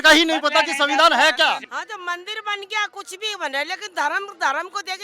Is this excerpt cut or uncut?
cut